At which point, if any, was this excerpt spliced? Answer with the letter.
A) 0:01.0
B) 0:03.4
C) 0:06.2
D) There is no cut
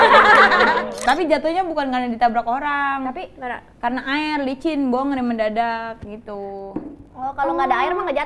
A